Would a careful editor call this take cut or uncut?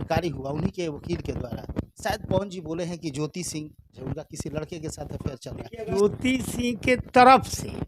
cut